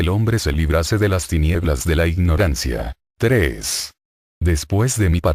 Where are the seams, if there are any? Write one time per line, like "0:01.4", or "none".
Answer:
0:03.1